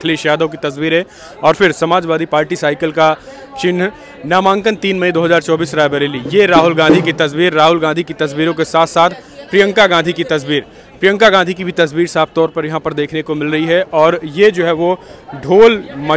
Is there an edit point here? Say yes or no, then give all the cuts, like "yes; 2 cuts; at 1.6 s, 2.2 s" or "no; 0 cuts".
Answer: no; 0 cuts